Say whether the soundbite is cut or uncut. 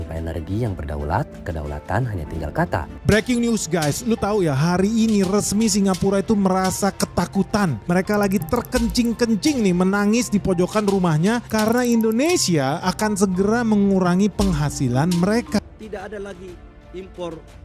cut